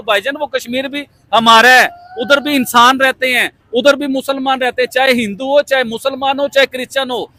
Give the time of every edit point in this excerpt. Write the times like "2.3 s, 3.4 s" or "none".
none